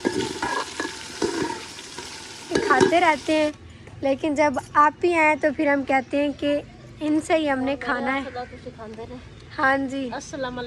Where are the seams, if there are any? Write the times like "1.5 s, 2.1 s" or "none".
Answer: 2.9 s